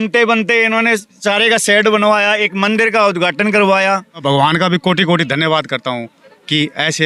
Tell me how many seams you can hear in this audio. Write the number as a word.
one